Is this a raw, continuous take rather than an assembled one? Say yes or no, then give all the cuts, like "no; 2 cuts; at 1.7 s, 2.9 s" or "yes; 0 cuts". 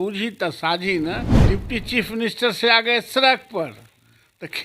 no; 1 cut; at 1.3 s